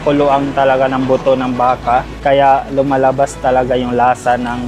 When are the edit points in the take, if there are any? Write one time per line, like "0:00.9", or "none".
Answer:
0:02.1